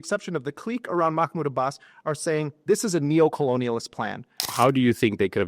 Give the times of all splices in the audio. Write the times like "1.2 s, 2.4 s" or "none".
4.5 s